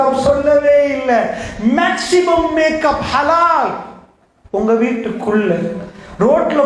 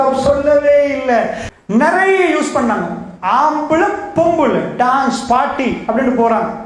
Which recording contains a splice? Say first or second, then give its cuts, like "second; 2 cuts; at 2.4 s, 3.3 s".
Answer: second; 1 cut; at 1.4 s